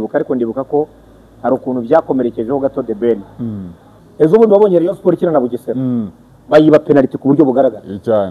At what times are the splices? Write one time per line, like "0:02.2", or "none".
0:04.0

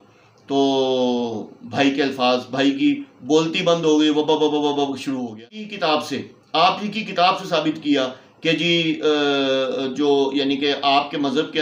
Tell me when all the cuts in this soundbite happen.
0:05.6

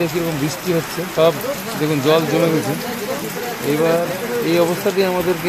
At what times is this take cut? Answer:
0:01.0

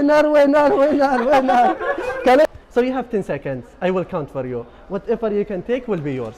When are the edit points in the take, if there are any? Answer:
0:02.5

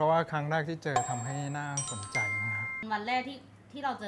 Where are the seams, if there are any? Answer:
0:02.8

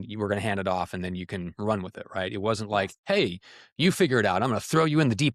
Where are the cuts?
none

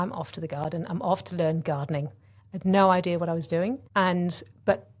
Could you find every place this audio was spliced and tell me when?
0:03.8

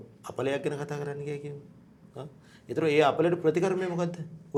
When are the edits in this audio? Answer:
none

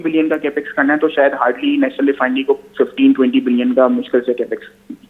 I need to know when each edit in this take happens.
none

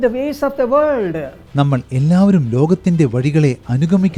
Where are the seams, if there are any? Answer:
none

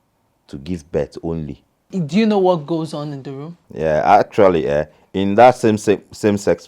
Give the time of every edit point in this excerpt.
0:01.9

